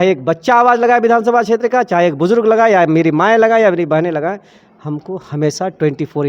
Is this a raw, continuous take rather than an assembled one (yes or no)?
yes